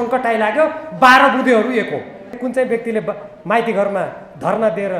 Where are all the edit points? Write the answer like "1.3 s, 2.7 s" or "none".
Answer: 2.4 s